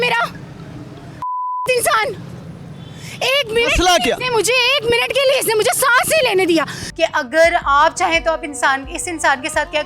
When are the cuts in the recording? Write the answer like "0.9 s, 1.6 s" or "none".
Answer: 6.8 s